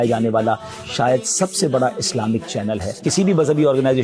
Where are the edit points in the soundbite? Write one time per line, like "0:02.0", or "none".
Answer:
0:03.1